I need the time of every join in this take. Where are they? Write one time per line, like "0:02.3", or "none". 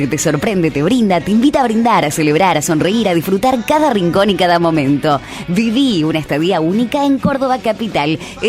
none